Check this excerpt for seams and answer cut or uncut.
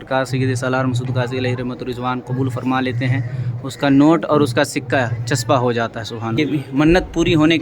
cut